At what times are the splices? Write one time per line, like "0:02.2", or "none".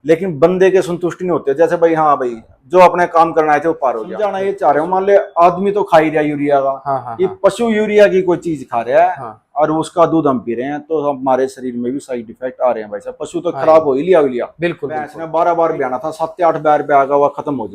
0:04.4
0:15.2